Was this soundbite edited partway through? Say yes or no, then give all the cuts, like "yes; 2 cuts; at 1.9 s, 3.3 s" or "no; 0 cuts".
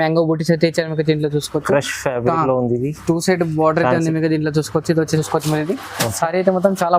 yes; 1 cut; at 5.1 s